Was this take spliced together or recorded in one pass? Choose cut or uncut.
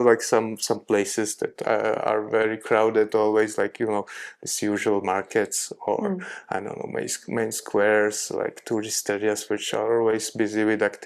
uncut